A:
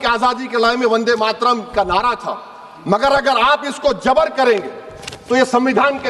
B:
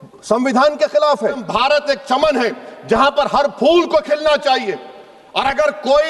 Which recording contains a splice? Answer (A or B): B